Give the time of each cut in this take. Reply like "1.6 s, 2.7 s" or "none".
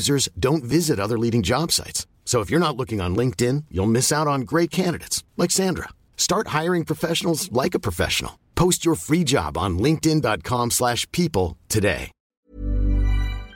12.2 s